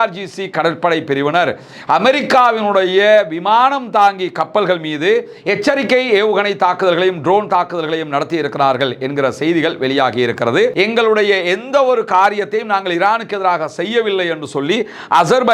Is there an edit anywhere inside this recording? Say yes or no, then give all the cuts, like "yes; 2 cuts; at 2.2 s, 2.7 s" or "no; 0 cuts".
yes; 1 cut; at 10.7 s